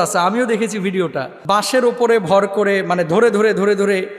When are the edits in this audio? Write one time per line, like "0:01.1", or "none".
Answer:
0:01.3